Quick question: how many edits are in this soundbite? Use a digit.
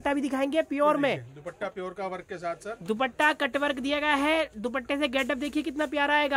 0